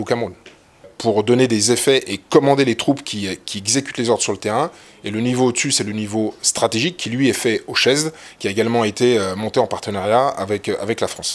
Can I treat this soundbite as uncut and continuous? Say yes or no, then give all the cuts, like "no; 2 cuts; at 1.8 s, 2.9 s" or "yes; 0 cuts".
no; 1 cut; at 0.9 s